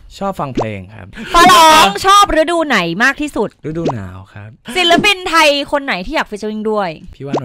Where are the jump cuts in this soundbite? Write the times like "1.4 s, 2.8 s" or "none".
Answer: 1.1 s, 4.6 s